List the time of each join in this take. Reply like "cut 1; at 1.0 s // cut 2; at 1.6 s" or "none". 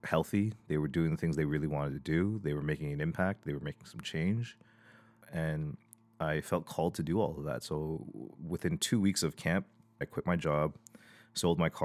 cut 1; at 5.2 s // cut 2; at 10.0 s